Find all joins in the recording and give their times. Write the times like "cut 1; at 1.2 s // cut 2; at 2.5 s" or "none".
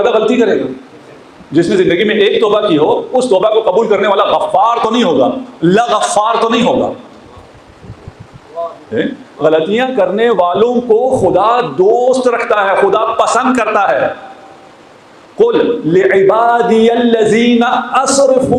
none